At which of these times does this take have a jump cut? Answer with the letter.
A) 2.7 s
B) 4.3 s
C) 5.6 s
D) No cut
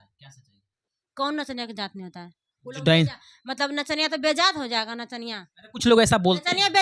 D